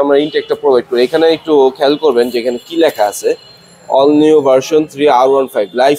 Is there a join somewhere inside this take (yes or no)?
no